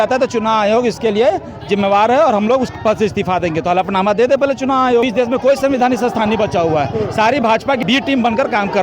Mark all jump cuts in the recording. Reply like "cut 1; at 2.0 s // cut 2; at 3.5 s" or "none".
cut 1; at 5.0 s // cut 2; at 7.8 s